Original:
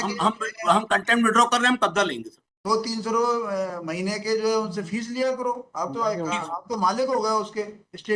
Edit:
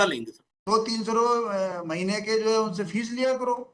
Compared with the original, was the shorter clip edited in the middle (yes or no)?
no